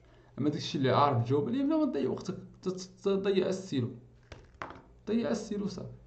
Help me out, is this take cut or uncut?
uncut